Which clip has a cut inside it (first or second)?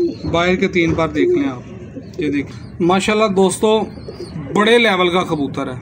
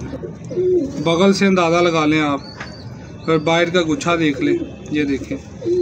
first